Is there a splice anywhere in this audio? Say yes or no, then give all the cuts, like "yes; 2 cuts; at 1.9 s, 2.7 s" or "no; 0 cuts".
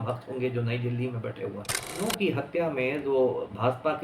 yes; 1 cut; at 2.0 s